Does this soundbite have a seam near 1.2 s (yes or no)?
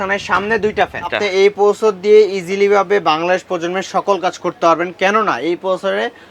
yes